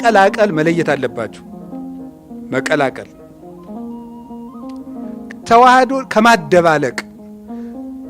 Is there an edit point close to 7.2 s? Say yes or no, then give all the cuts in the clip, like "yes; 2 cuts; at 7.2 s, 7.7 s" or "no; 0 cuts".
no; 2 cuts; at 3.2 s, 5.4 s